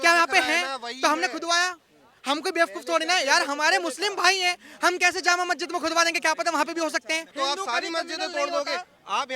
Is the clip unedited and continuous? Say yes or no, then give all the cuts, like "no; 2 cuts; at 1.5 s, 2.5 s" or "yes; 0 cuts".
no; 1 cut; at 7.3 s